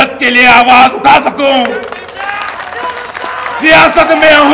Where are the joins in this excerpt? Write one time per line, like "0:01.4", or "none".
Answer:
none